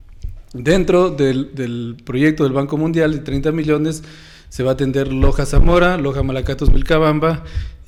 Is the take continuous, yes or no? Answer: yes